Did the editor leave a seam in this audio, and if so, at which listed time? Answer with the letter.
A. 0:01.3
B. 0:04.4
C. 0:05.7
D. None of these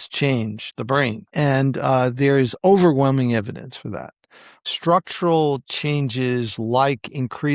B